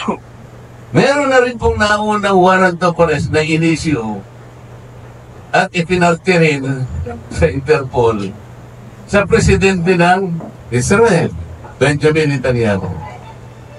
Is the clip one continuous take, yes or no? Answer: no